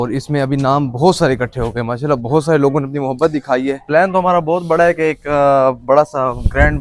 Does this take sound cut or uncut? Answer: uncut